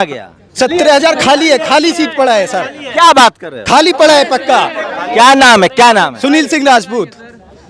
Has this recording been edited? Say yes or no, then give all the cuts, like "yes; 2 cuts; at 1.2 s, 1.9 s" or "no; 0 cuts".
no; 0 cuts